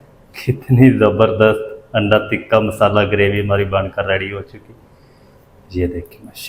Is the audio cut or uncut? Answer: uncut